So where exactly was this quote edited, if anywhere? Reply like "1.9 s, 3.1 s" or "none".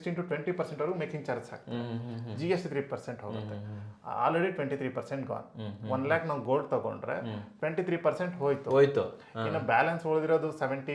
none